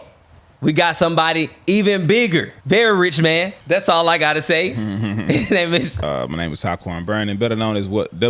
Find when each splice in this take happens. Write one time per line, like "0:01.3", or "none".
0:02.5
0:03.5
0:06.0